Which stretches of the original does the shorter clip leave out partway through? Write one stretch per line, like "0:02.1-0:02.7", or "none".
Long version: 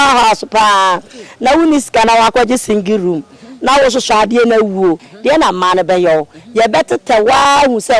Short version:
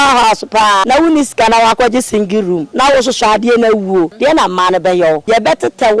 0:00.8-0:01.4
0:03.2-0:03.5
0:05.0-0:05.2
0:06.3-0:06.5